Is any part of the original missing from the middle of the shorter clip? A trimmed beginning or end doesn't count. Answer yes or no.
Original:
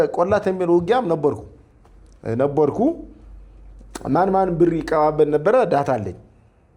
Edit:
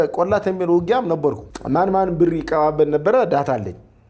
yes